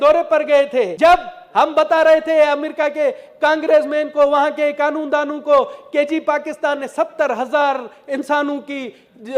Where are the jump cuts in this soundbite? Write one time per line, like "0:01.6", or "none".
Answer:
0:00.9